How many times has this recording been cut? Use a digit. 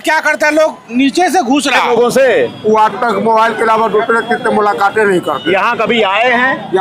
1